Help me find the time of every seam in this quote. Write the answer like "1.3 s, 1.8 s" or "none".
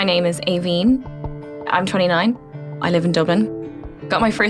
1.1 s, 2.4 s, 3.5 s